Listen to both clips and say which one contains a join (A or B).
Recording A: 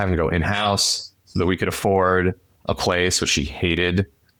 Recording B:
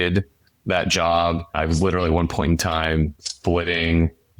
B